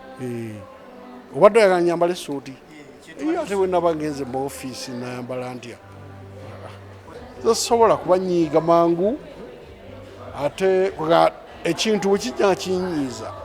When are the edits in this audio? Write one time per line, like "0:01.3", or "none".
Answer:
0:07.1